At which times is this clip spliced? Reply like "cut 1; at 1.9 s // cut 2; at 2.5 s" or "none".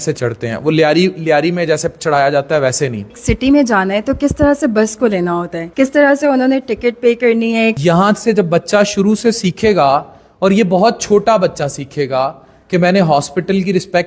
cut 1; at 3.0 s // cut 2; at 7.8 s